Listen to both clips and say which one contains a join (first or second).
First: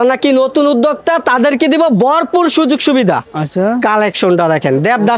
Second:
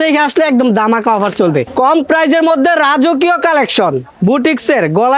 second